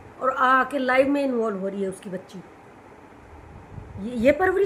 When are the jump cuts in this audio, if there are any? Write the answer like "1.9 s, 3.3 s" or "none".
none